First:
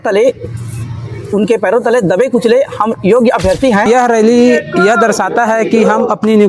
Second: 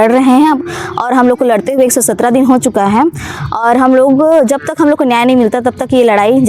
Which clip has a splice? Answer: first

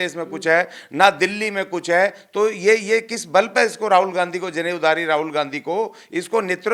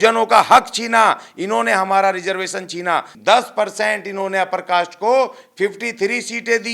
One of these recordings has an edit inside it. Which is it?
second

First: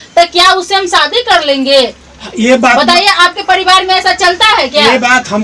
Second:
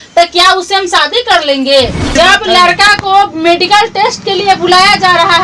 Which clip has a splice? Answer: second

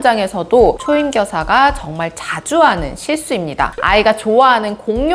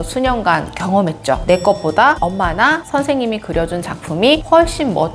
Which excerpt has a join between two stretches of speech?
first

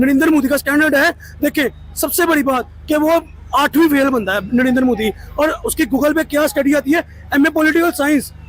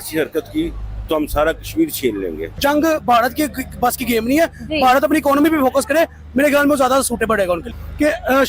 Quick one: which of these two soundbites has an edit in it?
second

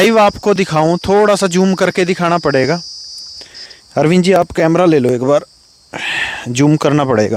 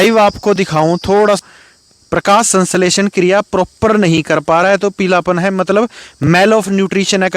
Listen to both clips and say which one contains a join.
second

